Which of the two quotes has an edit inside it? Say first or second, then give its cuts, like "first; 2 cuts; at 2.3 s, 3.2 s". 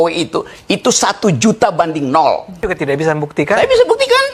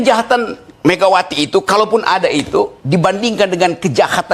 first; 1 cut; at 2.7 s